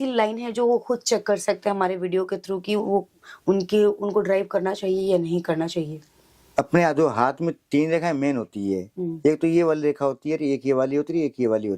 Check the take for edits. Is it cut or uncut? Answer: uncut